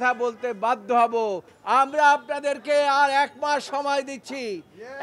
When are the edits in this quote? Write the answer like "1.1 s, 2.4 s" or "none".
1.5 s